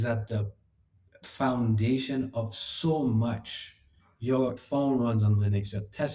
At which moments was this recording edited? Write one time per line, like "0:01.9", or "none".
0:04.6